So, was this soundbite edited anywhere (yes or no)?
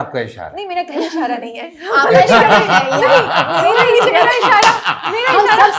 no